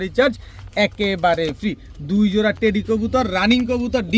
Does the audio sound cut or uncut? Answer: uncut